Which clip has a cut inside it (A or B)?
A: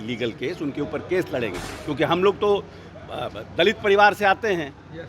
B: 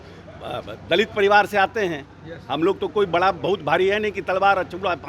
A